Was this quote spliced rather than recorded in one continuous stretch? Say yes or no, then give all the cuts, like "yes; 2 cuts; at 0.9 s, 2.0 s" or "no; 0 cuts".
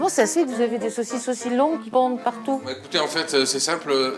no; 0 cuts